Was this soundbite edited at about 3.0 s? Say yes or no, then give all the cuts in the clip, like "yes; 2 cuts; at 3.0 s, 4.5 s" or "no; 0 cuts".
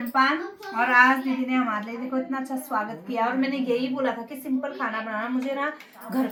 no; 0 cuts